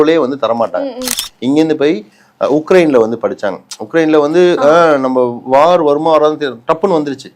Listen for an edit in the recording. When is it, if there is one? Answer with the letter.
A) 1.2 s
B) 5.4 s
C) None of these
A